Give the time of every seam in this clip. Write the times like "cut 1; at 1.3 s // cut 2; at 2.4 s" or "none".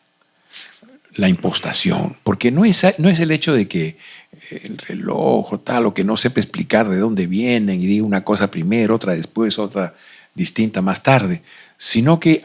none